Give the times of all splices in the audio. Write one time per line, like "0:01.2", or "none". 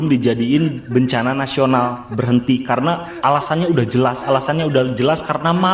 none